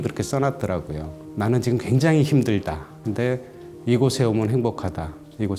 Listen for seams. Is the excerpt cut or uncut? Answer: uncut